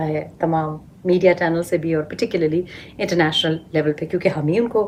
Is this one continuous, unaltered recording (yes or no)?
yes